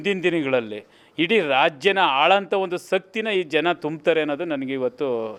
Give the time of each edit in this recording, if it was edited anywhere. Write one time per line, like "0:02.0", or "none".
none